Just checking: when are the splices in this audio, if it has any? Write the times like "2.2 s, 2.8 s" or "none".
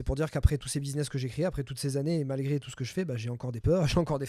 none